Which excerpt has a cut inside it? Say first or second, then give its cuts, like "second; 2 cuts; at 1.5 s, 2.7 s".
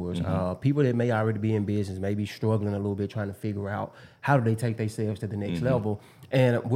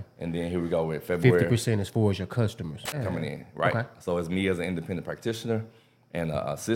second; 1 cut; at 3.0 s